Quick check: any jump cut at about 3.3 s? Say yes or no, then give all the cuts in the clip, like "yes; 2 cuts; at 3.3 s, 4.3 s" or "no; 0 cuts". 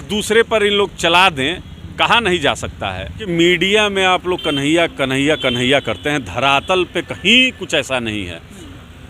yes; 1 cut; at 3.3 s